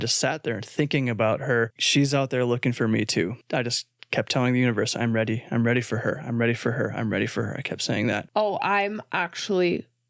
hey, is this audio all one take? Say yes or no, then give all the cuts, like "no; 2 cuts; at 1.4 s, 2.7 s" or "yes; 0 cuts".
no; 3 cuts; at 1.8 s, 3.4 s, 8.2 s